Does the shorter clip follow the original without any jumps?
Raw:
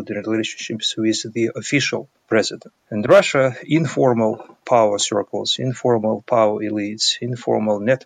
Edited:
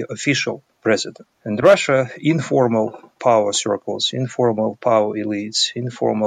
yes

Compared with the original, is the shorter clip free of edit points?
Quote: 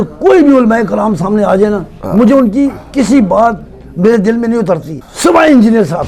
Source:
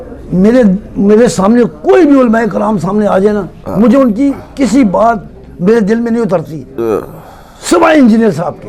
no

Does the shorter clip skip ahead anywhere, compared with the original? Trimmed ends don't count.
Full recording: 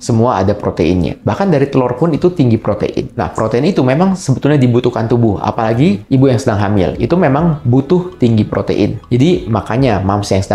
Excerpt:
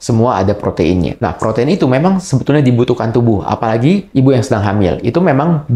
yes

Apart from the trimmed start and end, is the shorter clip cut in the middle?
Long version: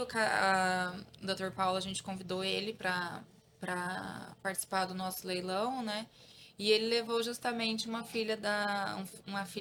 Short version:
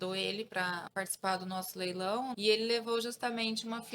yes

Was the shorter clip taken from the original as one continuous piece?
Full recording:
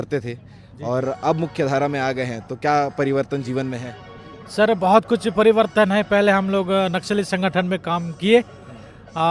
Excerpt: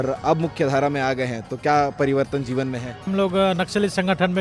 no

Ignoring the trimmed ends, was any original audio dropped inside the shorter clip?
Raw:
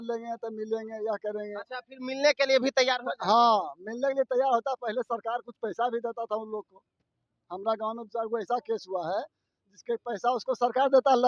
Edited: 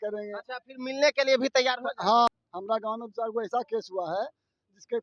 yes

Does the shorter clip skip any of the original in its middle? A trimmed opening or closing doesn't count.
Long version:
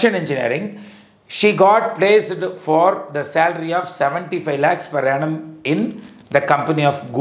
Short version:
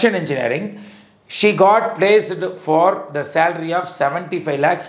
no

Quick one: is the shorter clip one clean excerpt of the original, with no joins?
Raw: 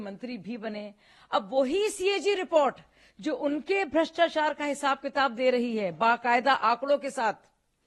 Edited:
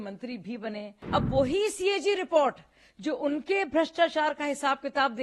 no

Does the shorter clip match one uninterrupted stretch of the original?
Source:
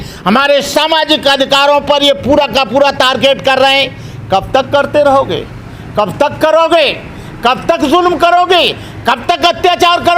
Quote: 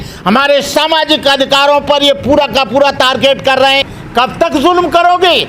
no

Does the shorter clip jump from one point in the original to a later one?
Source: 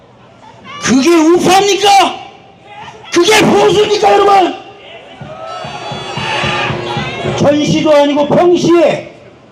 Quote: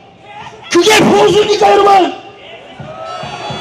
no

